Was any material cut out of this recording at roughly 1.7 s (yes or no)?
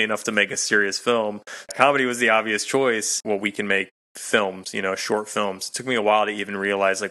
yes